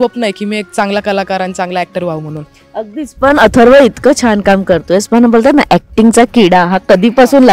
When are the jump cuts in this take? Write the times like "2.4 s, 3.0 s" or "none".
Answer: none

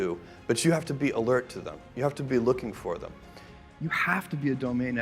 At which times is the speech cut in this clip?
3.5 s

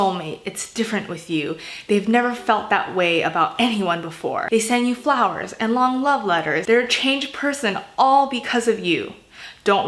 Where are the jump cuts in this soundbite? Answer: 4.4 s, 6.6 s

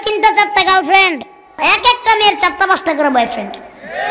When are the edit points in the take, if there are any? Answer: 1.6 s

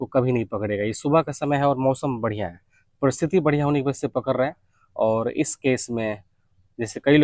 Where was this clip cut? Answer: none

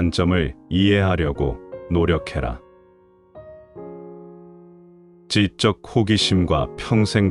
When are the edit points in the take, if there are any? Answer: none

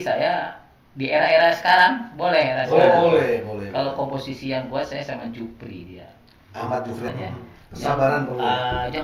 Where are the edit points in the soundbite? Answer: 7.1 s

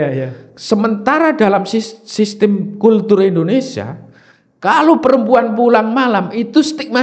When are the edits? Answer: none

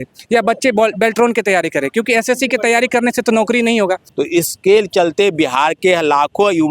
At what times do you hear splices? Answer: 4.1 s

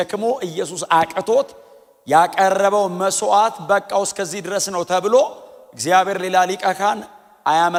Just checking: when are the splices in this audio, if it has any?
none

